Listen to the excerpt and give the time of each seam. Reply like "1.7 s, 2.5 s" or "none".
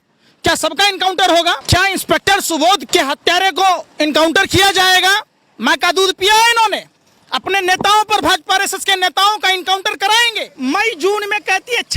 1.6 s, 2.8 s, 10.4 s

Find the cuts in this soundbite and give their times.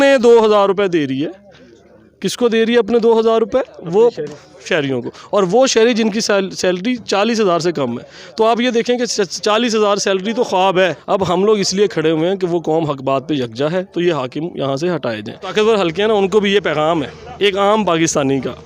11.0 s, 15.5 s

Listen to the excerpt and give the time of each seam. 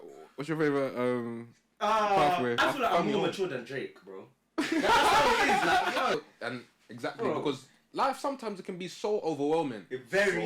2.6 s, 6.1 s

